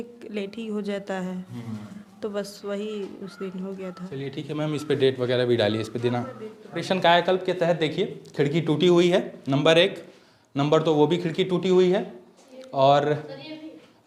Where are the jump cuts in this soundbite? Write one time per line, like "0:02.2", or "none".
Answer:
none